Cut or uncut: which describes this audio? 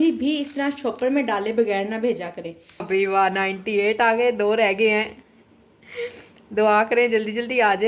cut